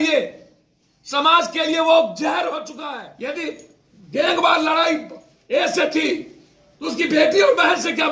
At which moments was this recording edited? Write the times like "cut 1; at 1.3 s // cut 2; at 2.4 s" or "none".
cut 1; at 2.8 s